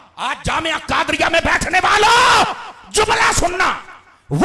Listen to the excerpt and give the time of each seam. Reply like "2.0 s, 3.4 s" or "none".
none

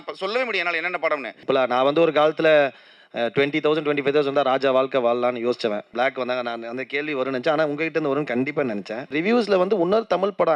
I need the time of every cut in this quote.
1.4 s, 5.9 s, 9.1 s

